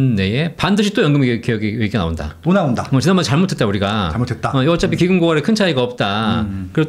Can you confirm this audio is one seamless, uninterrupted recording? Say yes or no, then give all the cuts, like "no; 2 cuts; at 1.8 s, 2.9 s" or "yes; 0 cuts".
yes; 0 cuts